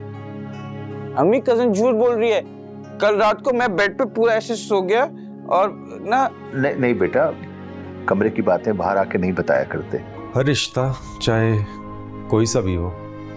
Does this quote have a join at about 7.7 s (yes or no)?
no